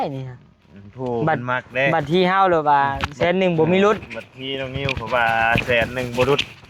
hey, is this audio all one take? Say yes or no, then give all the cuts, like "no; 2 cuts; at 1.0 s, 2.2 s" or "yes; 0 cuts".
yes; 0 cuts